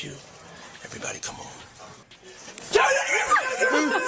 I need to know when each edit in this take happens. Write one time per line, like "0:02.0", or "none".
0:02.0